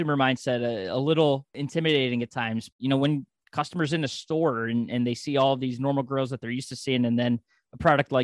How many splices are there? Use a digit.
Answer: 2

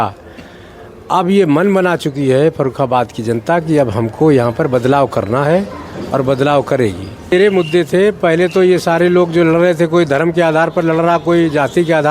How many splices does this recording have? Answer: 1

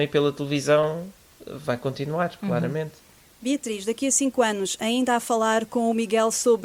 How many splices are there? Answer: 0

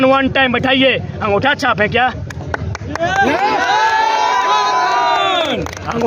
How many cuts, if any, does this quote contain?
0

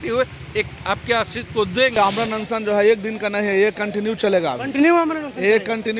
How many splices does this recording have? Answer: 1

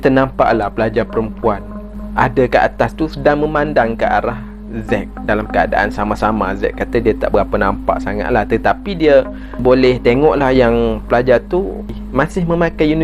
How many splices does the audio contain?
2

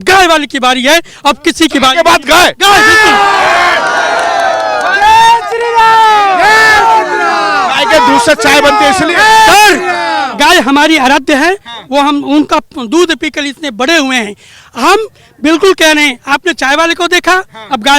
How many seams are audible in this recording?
0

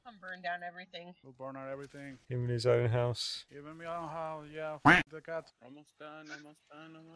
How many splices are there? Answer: 0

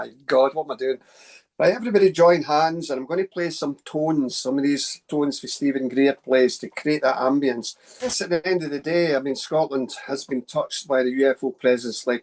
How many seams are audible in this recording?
1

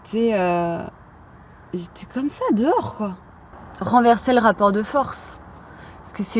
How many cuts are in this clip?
1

